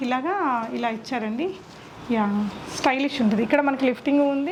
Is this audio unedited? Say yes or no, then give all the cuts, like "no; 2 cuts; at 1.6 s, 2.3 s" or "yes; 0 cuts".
yes; 0 cuts